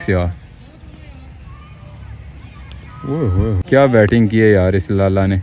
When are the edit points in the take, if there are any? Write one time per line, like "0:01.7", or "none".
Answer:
0:03.6